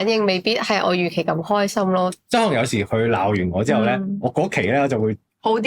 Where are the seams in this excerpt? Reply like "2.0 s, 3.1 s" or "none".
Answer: 2.1 s